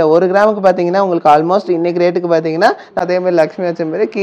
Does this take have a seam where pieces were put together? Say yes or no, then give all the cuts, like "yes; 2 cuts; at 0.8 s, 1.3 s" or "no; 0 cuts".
yes; 1 cut; at 3.0 s